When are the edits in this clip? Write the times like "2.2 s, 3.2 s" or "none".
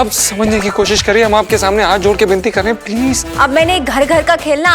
3.3 s